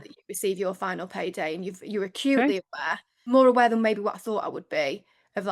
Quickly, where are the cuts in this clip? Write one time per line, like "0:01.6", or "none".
0:03.3